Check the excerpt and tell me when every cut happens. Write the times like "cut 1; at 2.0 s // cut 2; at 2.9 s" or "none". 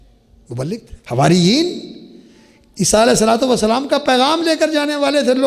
cut 1; at 0.9 s

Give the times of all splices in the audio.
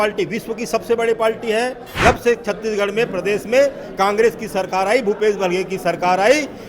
cut 1; at 1.9 s

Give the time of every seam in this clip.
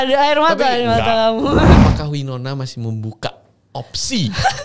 cut 1; at 1.7 s

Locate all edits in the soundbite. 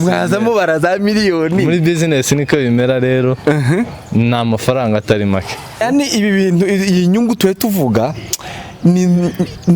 cut 1; at 5.6 s

